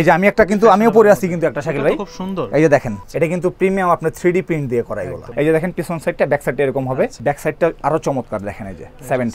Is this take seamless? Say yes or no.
no